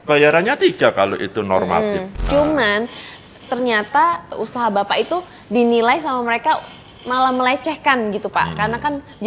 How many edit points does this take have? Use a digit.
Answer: 2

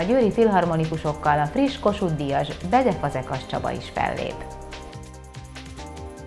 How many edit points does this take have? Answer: 1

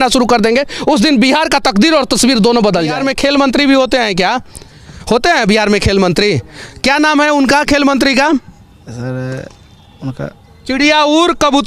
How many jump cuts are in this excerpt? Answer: 1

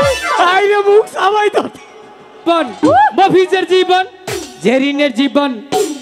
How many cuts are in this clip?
1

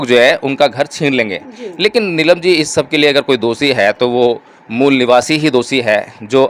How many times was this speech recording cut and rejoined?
0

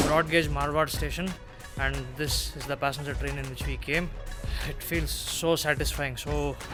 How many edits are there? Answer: 0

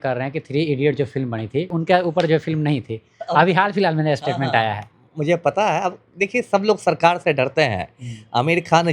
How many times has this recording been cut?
1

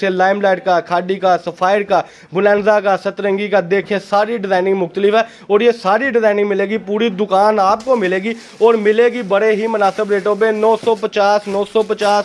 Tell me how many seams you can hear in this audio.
0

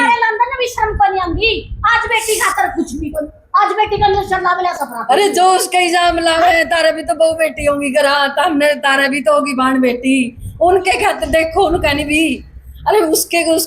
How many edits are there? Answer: 0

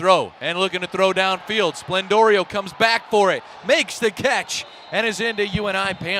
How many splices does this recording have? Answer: 0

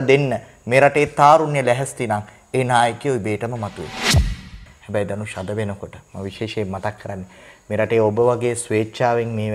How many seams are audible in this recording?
1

